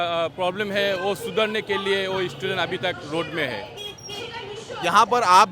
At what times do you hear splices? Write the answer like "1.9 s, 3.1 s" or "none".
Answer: none